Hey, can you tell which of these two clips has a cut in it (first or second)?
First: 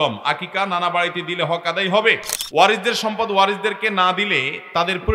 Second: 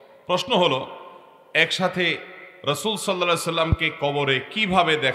first